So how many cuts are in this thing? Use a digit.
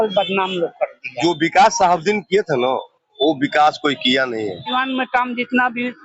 2